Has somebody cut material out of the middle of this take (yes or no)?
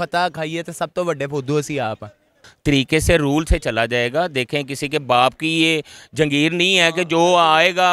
yes